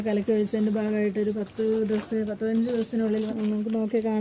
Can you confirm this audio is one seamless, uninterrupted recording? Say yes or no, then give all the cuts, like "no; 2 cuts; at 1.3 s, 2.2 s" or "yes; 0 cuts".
no; 1 cut; at 3.3 s